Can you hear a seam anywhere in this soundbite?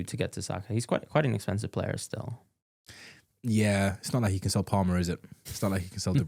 no; 0 cuts

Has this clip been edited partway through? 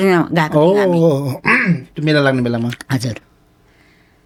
no; 0 cuts

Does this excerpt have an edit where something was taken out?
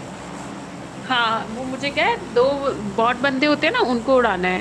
no; 0 cuts

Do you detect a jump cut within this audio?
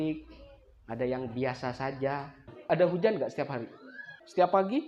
yes; 1 cut; at 2.5 s

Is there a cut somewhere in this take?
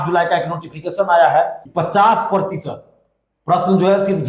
yes; 1 cut; at 1.6 s

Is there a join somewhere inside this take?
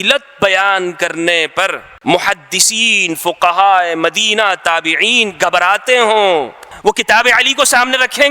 yes; 2 cuts; at 1.9 s, 6.6 s

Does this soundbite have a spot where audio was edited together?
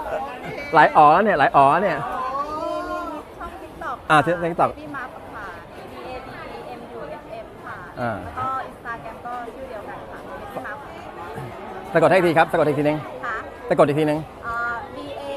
no; 0 cuts

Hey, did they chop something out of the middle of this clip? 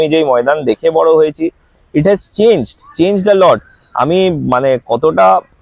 no; 0 cuts

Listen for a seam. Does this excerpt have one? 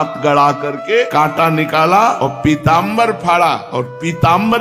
yes; 3 cuts; at 1.1 s, 2.2 s, 3.6 s

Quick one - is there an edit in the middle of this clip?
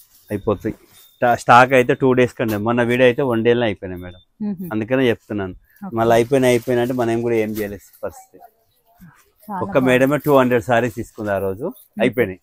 no; 0 cuts

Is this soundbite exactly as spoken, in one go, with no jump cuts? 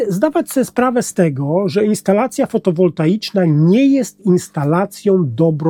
yes; 0 cuts

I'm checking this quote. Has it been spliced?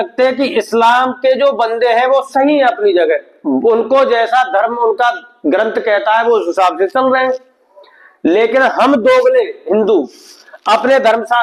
no; 0 cuts

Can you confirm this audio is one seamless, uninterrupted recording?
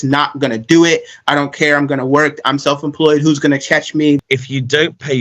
no; 1 cut; at 4.2 s

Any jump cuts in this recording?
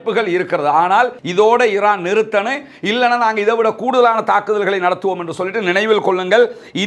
yes; 1 cut; at 1.2 s

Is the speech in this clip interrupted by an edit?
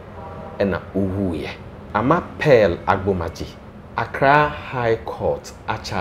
no; 0 cuts

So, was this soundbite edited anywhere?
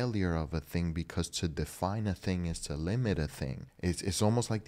yes; 1 cut; at 3.7 s

